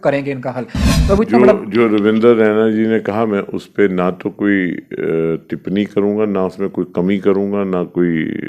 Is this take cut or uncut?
uncut